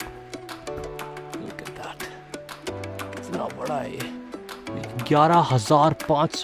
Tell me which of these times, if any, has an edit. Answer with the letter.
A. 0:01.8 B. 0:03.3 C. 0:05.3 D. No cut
B